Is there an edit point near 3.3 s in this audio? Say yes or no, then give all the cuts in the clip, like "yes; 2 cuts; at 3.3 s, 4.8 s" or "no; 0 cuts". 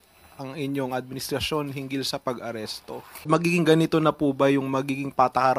yes; 1 cut; at 3.3 s